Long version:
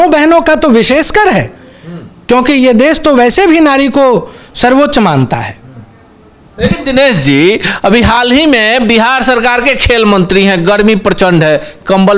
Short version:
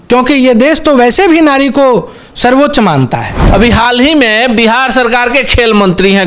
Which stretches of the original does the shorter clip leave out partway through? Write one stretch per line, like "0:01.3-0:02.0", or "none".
0:05.6-0:07.7